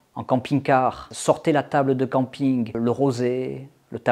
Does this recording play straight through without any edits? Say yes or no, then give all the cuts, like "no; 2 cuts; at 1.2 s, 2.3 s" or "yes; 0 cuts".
no; 2 cuts; at 1.1 s, 2.8 s